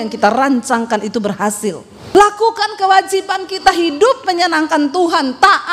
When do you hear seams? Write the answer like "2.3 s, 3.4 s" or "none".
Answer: 1.9 s